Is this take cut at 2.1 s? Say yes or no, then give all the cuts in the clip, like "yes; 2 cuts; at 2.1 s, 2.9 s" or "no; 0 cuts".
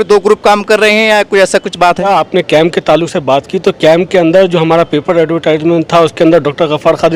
yes; 1 cut; at 2.1 s